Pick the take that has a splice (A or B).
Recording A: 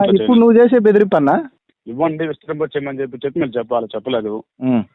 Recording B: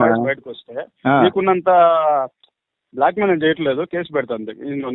A